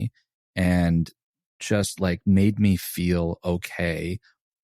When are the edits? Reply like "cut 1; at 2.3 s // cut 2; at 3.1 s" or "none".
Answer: cut 1; at 1.4 s